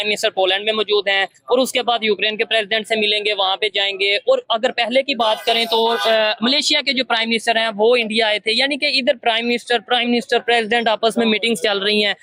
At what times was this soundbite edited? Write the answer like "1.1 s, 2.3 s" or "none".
none